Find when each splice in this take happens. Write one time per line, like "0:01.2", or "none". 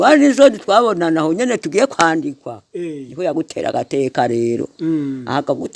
none